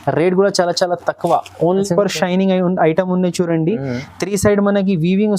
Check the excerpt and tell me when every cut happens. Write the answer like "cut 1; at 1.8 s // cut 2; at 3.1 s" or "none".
cut 1; at 1.8 s